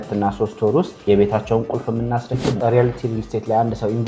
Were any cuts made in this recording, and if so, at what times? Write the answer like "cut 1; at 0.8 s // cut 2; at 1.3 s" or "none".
cut 1; at 0.9 s // cut 2; at 2.5 s